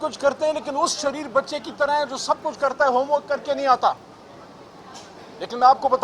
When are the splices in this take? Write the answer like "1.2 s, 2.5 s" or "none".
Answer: none